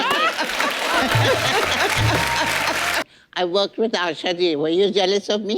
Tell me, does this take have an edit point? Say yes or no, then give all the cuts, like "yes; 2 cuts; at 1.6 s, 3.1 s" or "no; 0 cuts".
yes; 1 cut; at 3.1 s